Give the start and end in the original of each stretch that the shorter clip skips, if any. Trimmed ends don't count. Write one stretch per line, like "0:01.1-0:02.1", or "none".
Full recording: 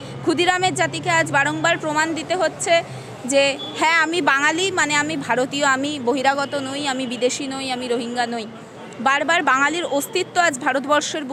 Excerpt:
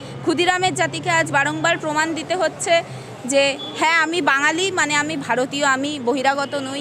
none